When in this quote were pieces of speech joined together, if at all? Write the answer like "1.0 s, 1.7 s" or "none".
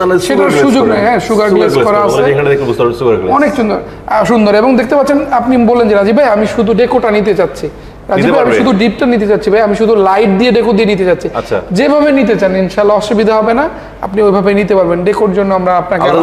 none